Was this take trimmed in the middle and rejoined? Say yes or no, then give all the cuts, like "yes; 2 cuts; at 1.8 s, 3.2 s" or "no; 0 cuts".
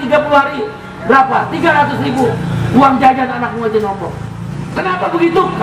yes; 1 cut; at 4.6 s